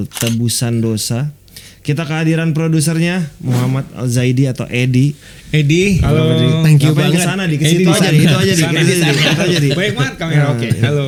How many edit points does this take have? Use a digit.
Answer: 0